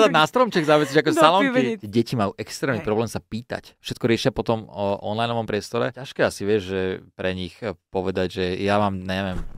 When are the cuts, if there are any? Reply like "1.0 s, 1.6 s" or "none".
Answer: 1.8 s, 3.8 s, 6.0 s